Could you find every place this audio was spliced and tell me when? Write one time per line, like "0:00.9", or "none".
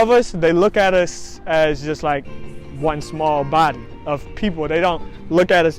none